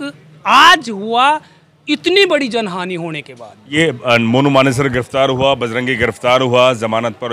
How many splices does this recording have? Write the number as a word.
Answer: one